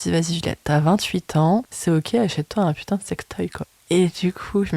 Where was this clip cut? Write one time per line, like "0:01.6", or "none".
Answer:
0:01.7
0:03.7